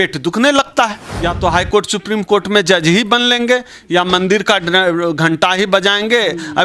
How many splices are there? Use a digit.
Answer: 1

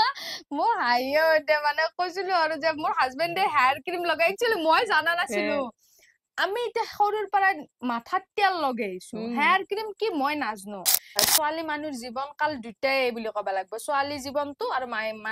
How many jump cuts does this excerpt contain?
1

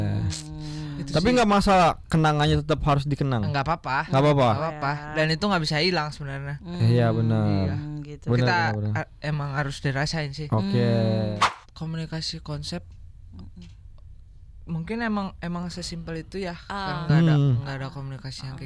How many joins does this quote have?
1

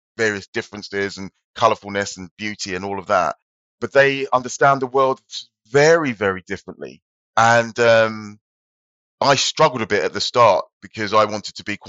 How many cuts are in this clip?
0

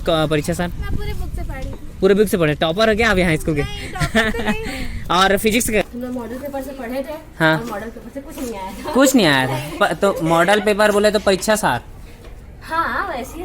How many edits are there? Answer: 1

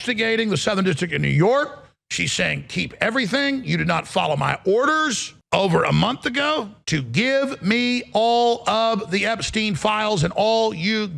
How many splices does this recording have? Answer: 2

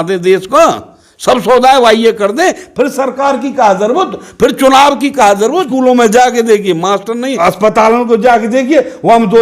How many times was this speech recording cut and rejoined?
2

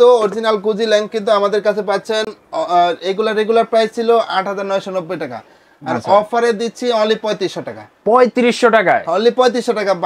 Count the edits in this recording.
0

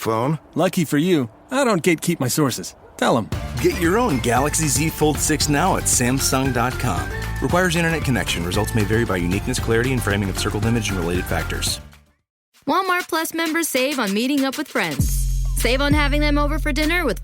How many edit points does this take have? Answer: 1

